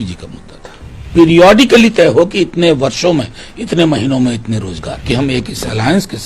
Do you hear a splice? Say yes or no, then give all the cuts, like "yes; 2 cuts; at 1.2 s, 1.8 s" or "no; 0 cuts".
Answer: yes; 2 cuts; at 1.1 s, 5.0 s